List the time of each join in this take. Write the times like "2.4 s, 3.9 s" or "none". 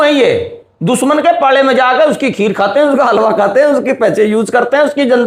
none